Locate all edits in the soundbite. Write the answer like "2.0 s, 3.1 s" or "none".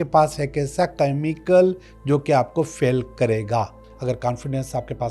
3.8 s